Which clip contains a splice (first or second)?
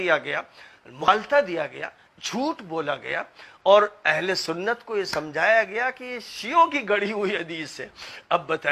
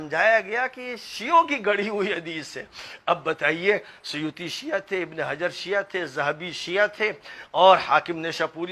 first